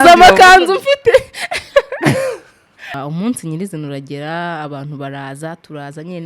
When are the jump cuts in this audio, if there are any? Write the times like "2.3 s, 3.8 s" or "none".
3.0 s